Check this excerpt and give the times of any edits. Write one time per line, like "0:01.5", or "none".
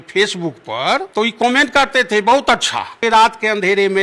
0:01.1
0:03.0